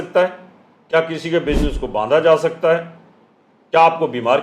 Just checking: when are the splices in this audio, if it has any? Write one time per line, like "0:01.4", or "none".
none